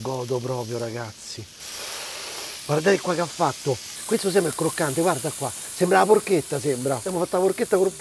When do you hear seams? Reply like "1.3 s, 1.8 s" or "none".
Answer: 1.5 s, 7.1 s